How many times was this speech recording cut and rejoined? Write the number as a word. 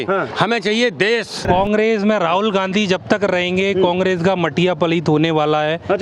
one